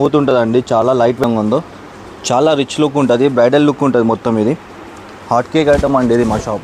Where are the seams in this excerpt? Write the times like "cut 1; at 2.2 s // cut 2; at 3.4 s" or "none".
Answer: cut 1; at 1.2 s